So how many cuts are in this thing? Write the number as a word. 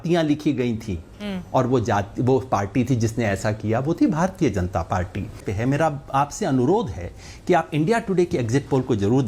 one